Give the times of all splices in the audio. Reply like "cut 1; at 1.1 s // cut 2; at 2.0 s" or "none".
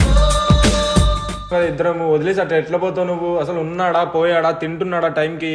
cut 1; at 1.5 s